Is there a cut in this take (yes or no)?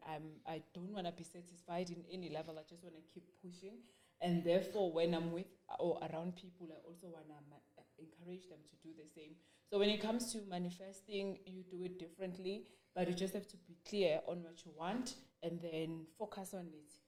no